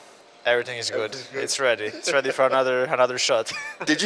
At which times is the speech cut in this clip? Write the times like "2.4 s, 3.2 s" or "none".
none